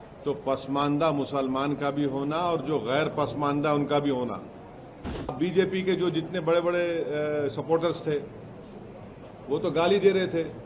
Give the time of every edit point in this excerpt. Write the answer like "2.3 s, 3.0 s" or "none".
5.3 s